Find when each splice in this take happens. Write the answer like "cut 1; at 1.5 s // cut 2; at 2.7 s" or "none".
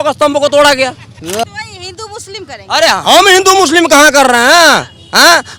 none

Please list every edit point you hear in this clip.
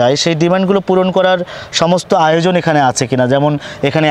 none

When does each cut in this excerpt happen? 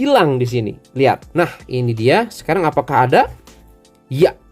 cut 1; at 1.2 s

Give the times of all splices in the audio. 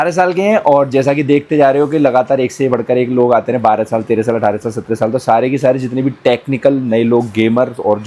none

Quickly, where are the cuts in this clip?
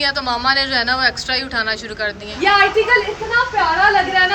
cut 1; at 2.3 s

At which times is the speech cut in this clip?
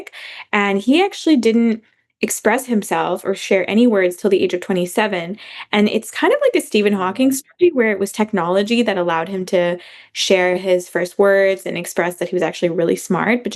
none

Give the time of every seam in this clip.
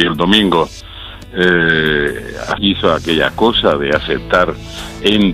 none

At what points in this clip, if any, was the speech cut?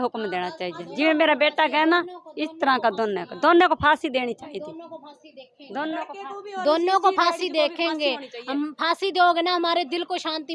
none

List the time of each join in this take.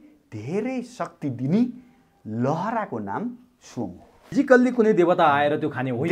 cut 1; at 4.2 s

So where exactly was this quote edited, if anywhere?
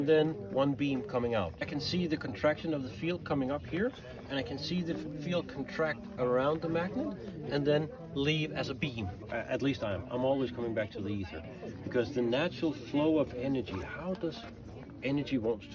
cut 1; at 1.7 s // cut 2; at 9.2 s

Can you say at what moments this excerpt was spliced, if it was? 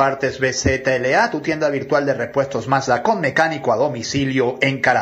none

